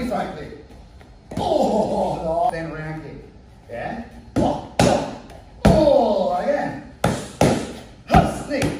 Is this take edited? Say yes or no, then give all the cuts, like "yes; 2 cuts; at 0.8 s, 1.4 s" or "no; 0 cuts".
yes; 1 cut; at 2.5 s